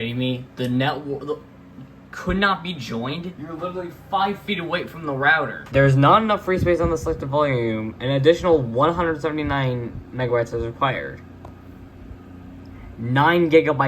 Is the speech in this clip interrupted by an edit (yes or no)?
yes